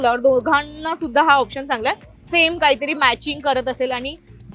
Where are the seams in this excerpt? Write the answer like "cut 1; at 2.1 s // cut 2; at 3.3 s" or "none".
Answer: none